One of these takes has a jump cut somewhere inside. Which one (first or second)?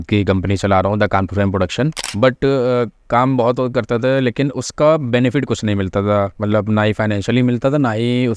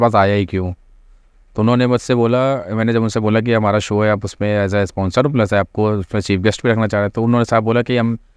first